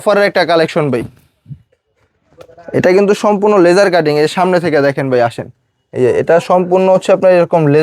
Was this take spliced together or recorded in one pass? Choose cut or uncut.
uncut